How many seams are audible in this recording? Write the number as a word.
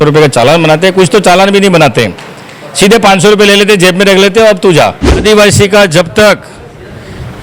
one